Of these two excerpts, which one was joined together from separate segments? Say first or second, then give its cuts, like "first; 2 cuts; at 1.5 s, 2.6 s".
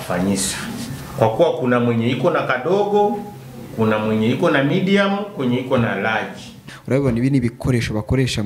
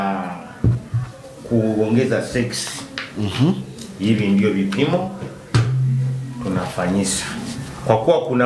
first; 1 cut; at 6.7 s